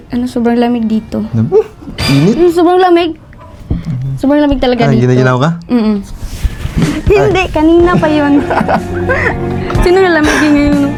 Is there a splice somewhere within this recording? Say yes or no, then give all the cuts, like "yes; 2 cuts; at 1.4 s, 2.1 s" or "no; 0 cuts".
no; 0 cuts